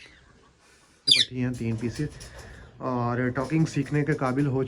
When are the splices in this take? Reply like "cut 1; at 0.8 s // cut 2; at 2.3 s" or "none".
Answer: cut 1; at 1.2 s